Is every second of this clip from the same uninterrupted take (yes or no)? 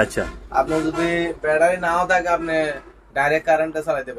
yes